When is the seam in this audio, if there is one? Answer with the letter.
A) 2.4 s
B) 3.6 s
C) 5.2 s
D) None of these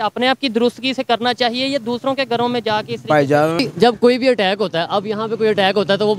B